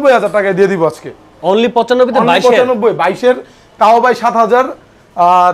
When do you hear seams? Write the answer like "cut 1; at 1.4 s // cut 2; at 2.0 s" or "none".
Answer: none